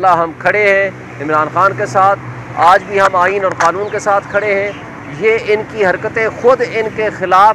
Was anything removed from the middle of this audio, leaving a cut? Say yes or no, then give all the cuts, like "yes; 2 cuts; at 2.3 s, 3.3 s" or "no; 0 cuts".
no; 0 cuts